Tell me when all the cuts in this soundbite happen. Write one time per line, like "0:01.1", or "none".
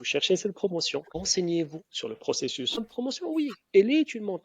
0:01.2
0:02.9